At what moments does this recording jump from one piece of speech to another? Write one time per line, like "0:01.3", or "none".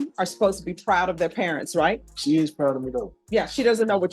0:02.1
0:03.1